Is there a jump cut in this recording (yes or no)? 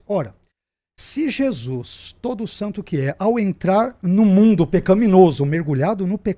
no